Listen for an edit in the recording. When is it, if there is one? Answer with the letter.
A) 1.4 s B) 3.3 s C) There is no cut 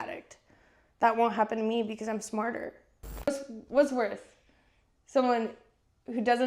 B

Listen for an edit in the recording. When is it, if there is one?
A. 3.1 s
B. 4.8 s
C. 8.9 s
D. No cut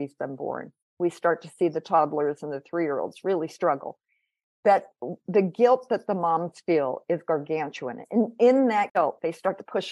C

